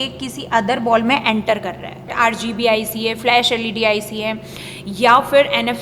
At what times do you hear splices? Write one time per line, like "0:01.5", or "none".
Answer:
0:02.1

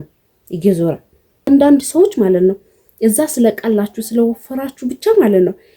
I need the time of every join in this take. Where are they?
0:01.5

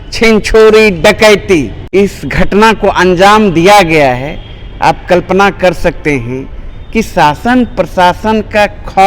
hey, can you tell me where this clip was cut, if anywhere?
0:01.8

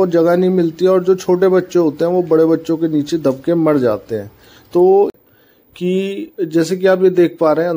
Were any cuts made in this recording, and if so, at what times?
0:05.2

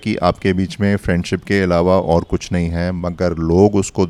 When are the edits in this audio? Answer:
none

